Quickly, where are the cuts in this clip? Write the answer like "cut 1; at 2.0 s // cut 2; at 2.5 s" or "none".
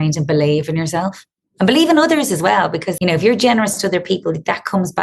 cut 1; at 2.9 s